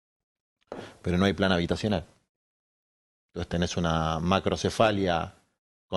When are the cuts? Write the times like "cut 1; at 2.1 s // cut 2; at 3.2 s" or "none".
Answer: none